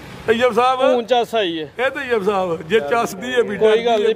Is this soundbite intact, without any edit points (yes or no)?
no